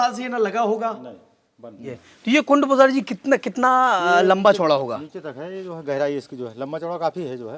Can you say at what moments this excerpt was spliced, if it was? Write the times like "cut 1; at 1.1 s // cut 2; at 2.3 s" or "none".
cut 1; at 2.0 s